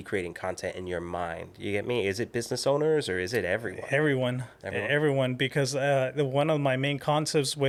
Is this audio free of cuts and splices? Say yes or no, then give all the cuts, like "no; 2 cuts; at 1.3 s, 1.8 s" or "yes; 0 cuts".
yes; 0 cuts